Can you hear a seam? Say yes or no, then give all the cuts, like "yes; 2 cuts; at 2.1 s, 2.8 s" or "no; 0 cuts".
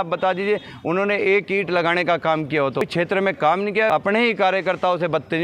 yes; 2 cuts; at 2.8 s, 3.9 s